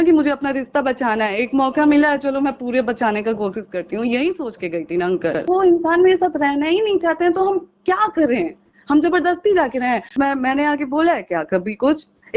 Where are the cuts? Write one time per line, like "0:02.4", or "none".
0:05.4
0:10.1